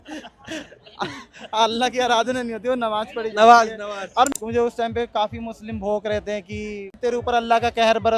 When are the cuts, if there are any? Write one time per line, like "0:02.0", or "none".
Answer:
0:04.3
0:06.9